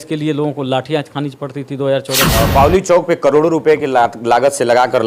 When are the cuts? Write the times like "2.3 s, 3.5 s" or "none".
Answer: 2.3 s